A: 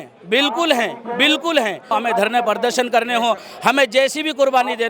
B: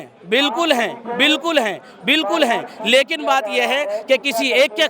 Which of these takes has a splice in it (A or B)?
A